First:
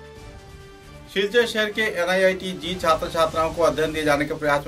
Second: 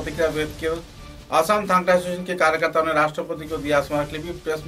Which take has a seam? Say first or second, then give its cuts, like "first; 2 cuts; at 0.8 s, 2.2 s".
first; 1 cut; at 0.9 s